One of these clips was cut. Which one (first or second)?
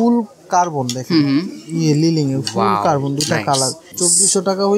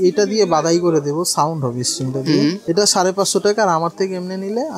first